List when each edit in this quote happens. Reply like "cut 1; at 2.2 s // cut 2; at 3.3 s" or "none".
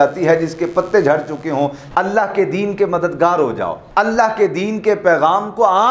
cut 1; at 1.8 s